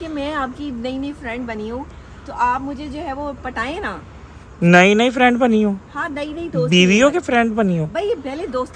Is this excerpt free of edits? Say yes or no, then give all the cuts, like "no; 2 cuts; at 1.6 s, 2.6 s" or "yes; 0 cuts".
yes; 0 cuts